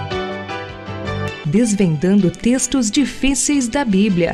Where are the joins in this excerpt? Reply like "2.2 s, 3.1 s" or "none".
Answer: none